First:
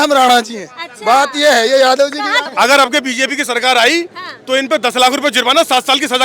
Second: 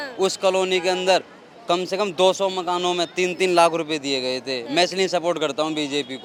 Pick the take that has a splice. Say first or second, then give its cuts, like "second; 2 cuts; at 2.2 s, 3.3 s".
first; 1 cut; at 2.4 s